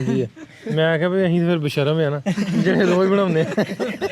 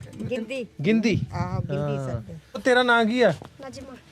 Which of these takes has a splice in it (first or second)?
second